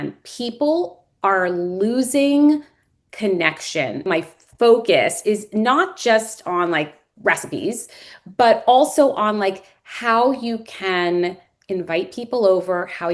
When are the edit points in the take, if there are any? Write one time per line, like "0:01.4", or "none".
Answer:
0:04.0